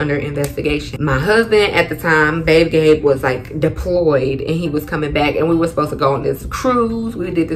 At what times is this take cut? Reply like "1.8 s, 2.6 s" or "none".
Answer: 0.9 s

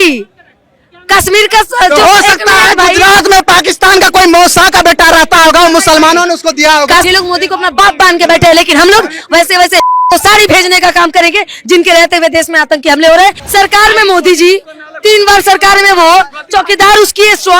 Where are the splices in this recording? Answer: 7.0 s, 13.4 s

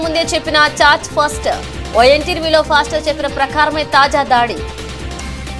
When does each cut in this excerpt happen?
none

